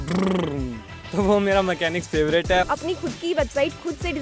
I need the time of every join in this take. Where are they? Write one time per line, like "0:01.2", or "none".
0:02.7